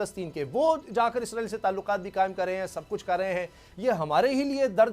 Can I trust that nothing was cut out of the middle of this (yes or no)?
yes